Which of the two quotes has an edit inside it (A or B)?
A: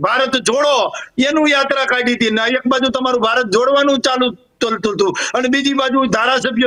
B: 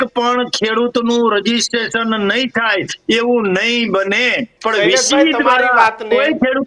B